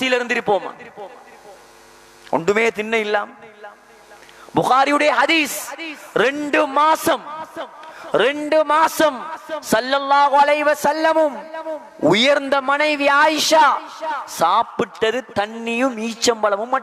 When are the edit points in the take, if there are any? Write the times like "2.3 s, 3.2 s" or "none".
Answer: none

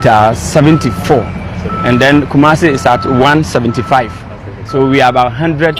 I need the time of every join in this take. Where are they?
none

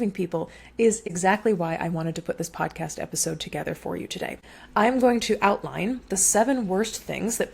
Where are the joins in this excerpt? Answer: 1.0 s, 4.5 s

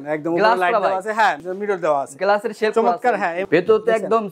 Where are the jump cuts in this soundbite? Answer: 1.5 s, 3.4 s

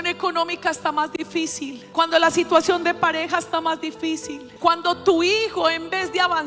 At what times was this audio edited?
1.8 s, 4.5 s

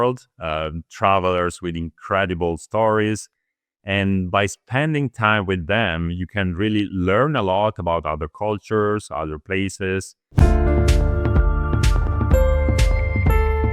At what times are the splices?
10.2 s

